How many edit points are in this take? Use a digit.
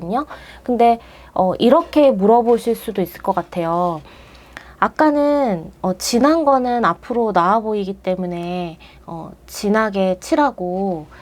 0